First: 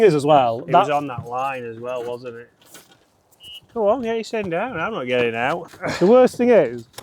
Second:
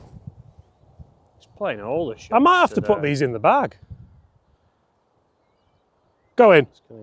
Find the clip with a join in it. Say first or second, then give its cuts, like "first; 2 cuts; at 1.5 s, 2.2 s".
first; 1 cut; at 5.7 s